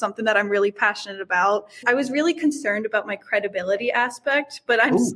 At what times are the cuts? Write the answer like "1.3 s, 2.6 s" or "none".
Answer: 1.9 s